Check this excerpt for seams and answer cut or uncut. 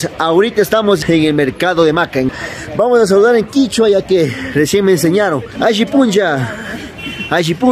cut